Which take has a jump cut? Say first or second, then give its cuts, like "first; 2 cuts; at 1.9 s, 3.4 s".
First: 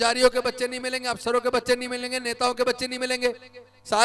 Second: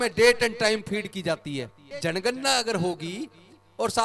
second; 1 cut; at 1.9 s